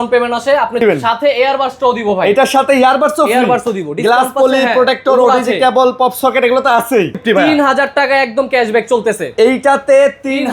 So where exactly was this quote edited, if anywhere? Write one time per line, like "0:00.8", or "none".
0:00.8
0:07.2